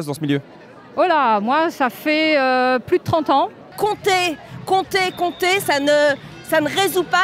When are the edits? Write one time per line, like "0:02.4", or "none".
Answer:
0:03.6